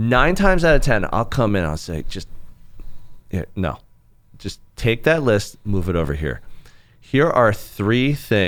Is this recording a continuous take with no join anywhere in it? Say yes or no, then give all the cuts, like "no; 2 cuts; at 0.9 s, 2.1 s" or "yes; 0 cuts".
yes; 0 cuts